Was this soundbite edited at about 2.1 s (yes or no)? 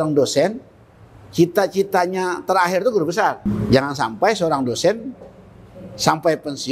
no